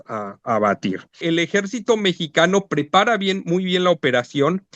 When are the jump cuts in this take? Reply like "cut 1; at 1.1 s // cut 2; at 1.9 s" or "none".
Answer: cut 1; at 1.2 s